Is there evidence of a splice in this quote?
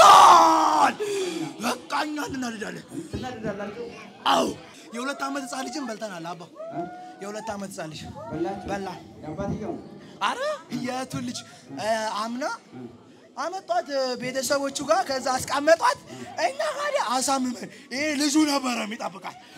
yes; 1 cut; at 4.7 s

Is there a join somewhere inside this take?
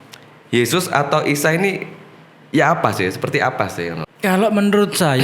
yes; 1 cut; at 4.1 s

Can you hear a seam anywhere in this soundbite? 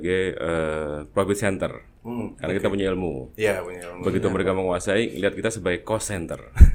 no; 0 cuts

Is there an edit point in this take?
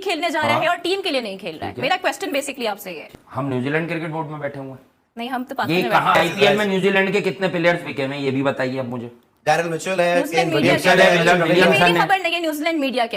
no; 0 cuts

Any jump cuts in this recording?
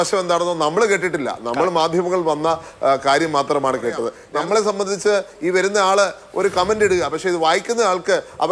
yes; 1 cut; at 4.1 s

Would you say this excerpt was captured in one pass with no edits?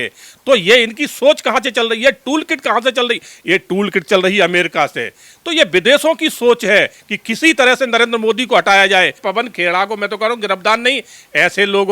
no; 1 cut; at 9.2 s

